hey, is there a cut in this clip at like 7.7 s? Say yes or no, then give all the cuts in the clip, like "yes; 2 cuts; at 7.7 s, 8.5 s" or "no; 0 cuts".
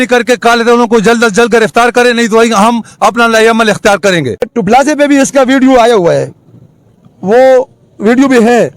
no; 1 cut; at 4.5 s